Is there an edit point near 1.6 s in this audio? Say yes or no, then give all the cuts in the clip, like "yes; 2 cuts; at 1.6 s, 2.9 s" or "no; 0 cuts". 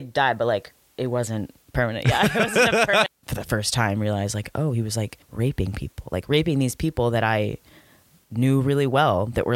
yes; 3 cuts; at 1.6 s, 3.1 s, 5.2 s